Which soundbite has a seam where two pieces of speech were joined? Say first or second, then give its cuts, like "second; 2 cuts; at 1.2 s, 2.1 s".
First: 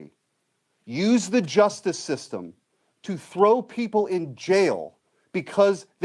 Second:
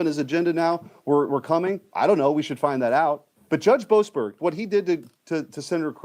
second; 2 cuts; at 3.3 s, 4.4 s